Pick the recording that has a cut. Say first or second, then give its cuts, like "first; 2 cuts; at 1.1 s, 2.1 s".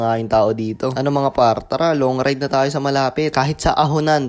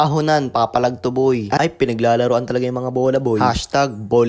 second; 1 cut; at 1.6 s